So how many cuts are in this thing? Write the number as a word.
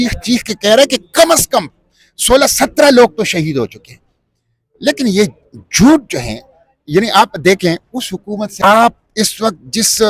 one